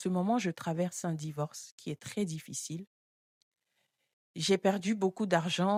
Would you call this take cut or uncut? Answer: uncut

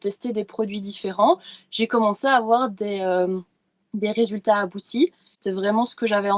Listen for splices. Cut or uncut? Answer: cut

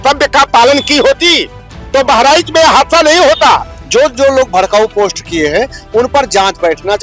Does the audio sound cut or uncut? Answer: cut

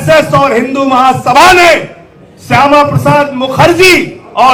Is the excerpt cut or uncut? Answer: uncut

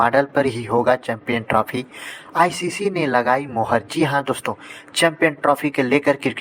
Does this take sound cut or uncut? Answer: uncut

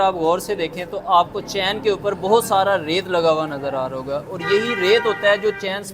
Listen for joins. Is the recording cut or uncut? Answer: uncut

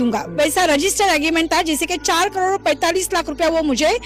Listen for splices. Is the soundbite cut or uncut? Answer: uncut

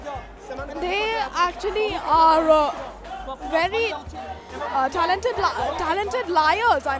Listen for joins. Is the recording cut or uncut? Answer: uncut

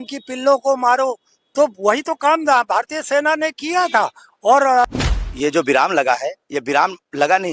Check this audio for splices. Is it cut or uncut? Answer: cut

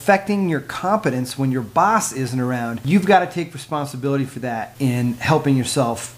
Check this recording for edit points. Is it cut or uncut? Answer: cut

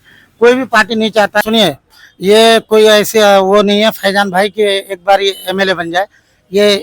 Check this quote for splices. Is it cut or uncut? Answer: cut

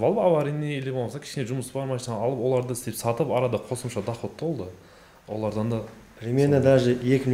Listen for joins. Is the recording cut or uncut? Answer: uncut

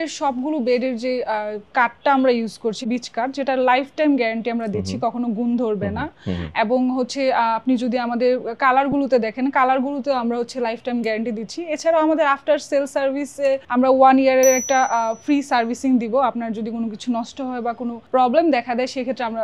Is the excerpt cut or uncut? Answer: uncut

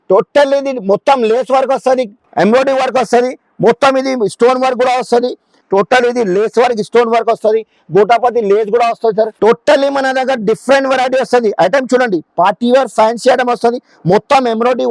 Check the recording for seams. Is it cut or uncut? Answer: cut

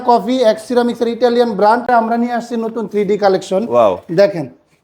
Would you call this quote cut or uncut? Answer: cut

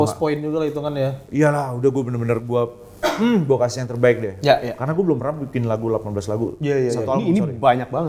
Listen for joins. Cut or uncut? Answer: uncut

